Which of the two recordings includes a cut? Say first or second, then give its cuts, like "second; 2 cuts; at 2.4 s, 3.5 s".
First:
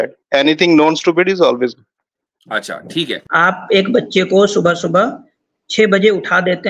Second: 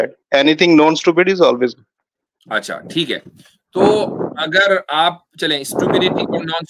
first; 1 cut; at 3.2 s